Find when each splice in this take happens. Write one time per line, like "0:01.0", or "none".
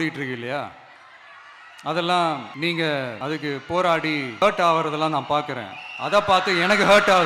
0:02.5
0:03.2
0:04.4